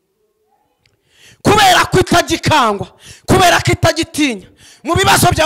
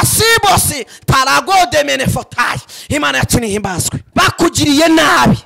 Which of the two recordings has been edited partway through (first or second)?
second